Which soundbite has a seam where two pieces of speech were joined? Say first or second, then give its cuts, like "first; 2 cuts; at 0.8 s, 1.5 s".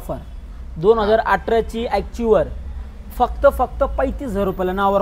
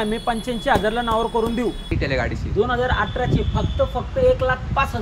second; 1 cut; at 1.9 s